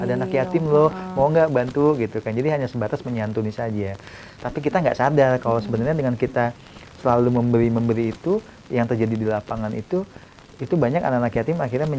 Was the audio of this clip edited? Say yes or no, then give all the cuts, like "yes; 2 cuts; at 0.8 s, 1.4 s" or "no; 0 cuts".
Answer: no; 0 cuts